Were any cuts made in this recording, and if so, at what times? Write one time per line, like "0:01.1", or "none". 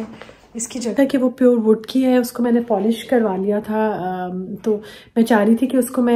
0:00.9